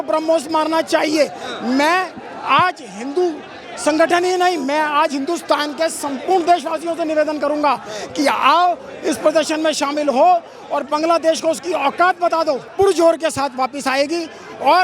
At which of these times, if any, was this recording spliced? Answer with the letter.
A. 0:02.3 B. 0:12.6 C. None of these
B